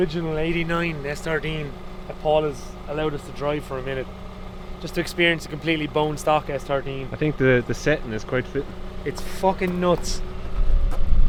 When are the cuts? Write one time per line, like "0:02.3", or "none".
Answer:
none